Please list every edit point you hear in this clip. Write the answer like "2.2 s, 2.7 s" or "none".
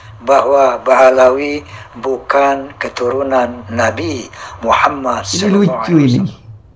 5.4 s